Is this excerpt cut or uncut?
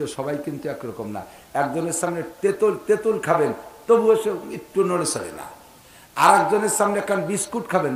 uncut